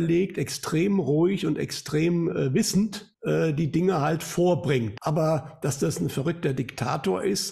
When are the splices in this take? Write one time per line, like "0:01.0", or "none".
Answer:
0:03.1
0:04.9